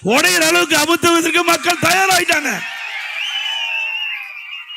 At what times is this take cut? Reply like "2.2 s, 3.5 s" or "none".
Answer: none